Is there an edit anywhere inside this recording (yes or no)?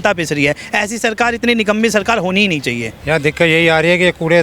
yes